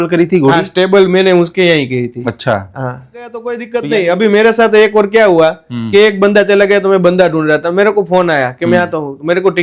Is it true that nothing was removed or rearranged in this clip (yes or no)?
no